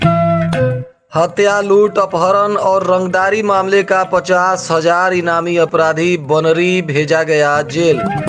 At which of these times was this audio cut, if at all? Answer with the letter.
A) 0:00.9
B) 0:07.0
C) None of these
A